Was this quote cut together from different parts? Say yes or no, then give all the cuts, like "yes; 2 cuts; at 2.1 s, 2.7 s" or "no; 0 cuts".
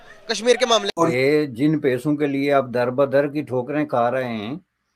yes; 1 cut; at 0.9 s